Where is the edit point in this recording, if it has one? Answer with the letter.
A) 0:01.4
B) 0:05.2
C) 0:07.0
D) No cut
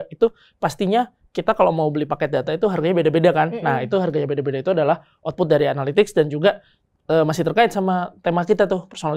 D